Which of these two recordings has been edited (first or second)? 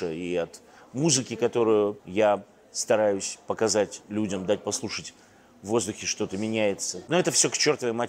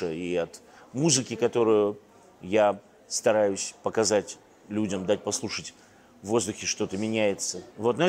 first